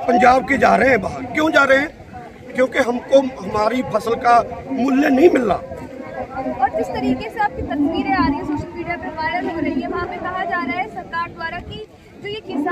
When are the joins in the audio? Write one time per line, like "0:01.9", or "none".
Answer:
none